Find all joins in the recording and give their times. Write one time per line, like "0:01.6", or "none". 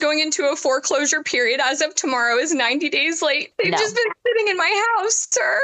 0:03.5